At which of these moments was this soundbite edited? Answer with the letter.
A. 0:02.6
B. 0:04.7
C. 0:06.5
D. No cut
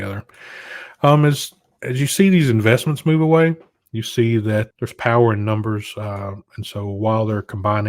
B